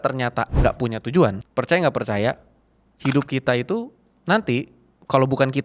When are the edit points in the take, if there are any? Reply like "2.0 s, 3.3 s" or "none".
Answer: 1.4 s